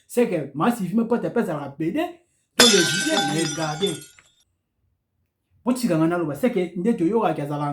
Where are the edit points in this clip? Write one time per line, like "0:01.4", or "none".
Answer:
0:03.5